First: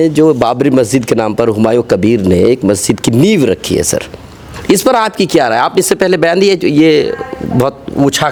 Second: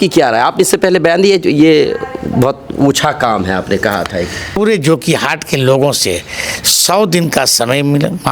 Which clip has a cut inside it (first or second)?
second